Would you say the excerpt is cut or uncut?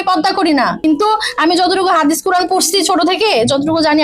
uncut